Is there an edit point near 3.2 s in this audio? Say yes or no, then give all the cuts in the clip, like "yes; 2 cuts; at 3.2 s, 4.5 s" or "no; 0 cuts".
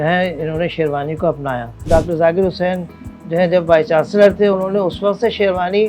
no; 1 cut; at 1.8 s